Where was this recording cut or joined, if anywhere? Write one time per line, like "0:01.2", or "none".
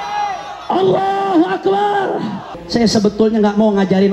0:02.5